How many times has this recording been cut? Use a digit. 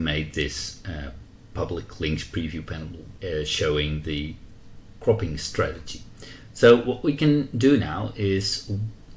1